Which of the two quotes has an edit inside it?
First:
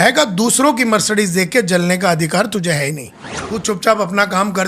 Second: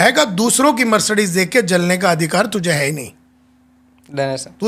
first; 1 cut; at 3.4 s

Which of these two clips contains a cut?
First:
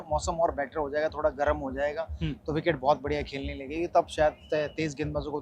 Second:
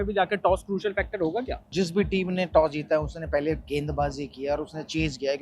second; 1 cut; at 1.7 s

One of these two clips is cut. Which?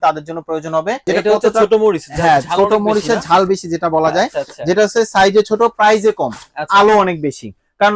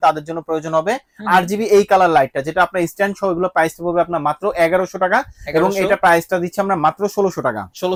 first; 1 cut; at 1.0 s

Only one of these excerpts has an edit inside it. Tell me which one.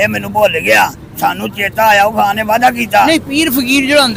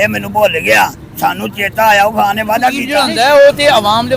second; 1 cut; at 2.9 s

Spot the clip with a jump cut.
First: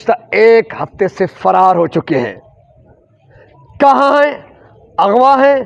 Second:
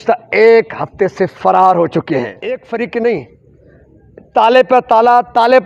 second; 1 cut; at 2.6 s

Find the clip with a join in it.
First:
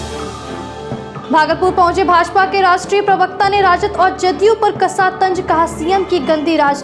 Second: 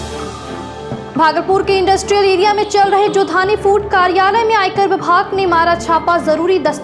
second; 1 cut; at 1.0 s

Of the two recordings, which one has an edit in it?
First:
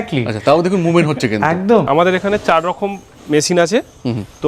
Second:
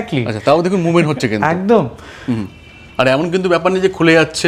first; 1 cut; at 1.9 s

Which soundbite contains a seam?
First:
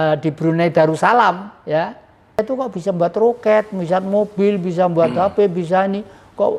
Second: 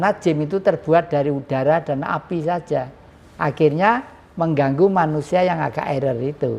first; 1 cut; at 2.4 s

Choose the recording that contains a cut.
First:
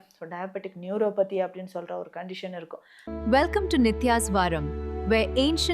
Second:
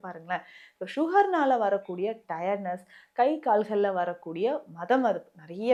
first; 1 cut; at 2.9 s

